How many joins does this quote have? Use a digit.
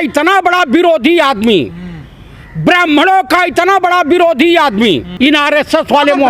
0